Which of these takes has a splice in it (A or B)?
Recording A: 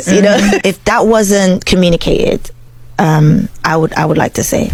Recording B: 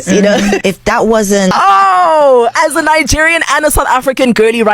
B